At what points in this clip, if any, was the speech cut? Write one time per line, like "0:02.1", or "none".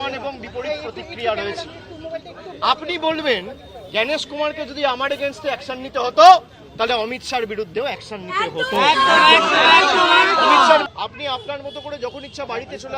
0:10.9